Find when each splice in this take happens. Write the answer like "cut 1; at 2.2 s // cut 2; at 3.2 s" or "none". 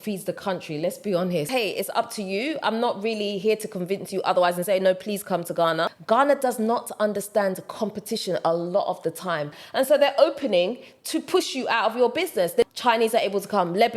cut 1; at 1.5 s // cut 2; at 6.0 s // cut 3; at 9.6 s // cut 4; at 12.6 s